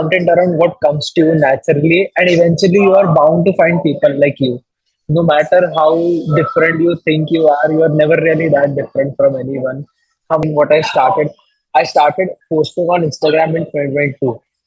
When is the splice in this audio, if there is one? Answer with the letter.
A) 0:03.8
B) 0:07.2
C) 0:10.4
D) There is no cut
C